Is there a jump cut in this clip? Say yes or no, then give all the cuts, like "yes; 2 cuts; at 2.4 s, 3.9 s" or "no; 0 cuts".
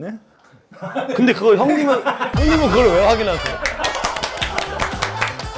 no; 0 cuts